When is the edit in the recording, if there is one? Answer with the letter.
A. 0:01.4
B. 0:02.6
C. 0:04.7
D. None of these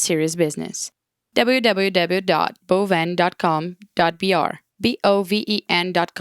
C